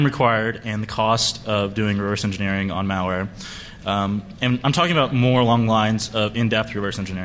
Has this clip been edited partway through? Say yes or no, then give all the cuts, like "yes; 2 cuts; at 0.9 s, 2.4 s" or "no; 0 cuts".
no; 0 cuts